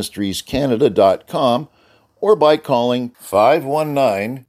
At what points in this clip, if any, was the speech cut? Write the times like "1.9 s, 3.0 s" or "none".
none